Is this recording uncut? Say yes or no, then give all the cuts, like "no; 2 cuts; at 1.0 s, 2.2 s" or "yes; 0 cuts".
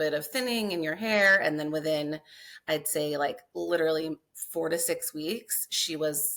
yes; 0 cuts